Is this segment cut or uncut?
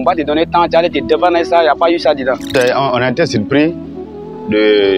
cut